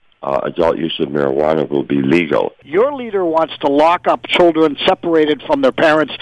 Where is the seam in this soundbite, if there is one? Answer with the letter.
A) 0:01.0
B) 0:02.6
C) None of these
B